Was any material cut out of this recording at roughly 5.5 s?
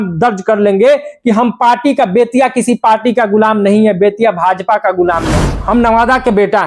yes; 1 cut; at 5.5 s

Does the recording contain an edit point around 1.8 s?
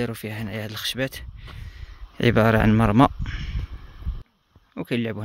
no; 1 cut; at 4.2 s

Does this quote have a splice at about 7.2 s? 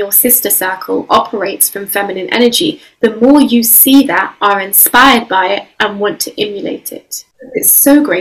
yes; 1 cut; at 7.2 s

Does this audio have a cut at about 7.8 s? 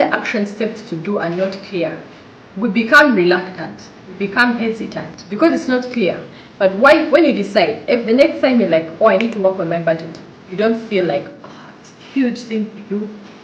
no; 1 cut; at 6.1 s

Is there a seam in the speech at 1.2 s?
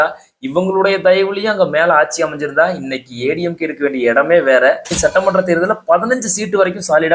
no; 1 cut; at 4.9 s

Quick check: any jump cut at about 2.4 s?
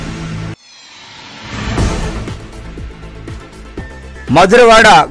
no; 1 cut; at 3.9 s

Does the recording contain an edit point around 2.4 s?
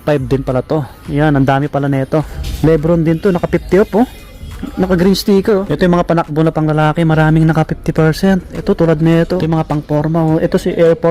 yes; 3 cuts; at 2.4 s, 5.7 s, 9.4 s

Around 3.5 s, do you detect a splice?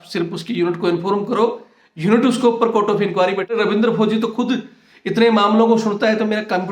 yes; 1 cut; at 3.5 s

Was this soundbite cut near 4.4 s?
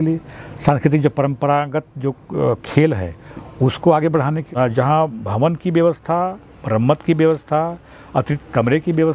yes; 1 cut; at 4.4 s

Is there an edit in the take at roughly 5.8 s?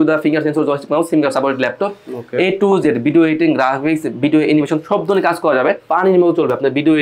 yes; 1 cut; at 5.8 s

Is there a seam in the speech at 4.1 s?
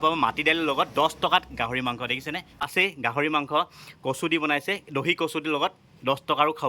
no; 1 cut; at 2.7 s

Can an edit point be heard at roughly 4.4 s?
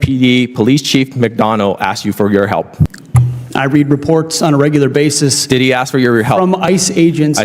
no; 1 cut; at 3.0 s

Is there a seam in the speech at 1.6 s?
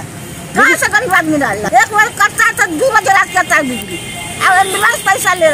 yes; 1 cut; at 1.6 s

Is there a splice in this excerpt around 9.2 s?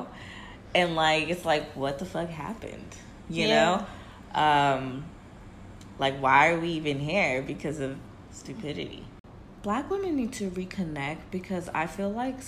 yes; 1 cut; at 9.2 s

